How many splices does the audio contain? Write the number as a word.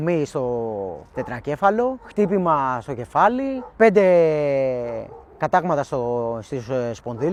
zero